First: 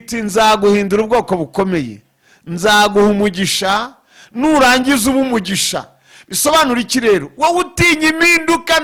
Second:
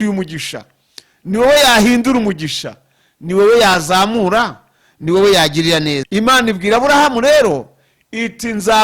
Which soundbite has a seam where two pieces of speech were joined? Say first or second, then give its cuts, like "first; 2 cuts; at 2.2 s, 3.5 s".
second; 1 cut; at 6.0 s